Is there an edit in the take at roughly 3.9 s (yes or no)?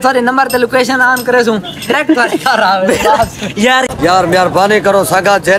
yes